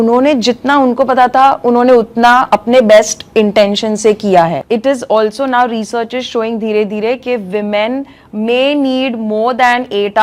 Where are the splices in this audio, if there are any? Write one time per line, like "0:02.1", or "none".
0:04.6